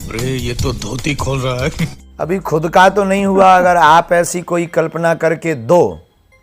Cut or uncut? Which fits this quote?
uncut